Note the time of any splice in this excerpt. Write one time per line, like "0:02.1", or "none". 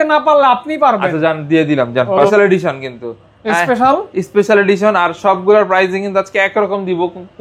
0:02.3